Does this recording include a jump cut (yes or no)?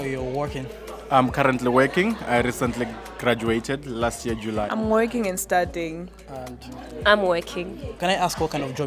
no